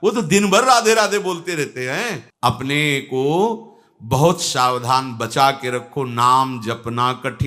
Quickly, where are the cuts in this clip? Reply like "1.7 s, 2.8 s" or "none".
2.2 s